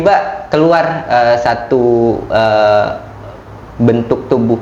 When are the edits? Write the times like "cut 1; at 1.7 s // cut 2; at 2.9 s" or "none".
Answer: none